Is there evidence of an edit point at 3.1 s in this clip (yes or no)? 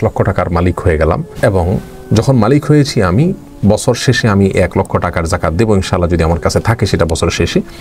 no